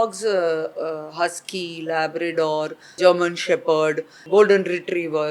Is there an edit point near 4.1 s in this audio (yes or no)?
yes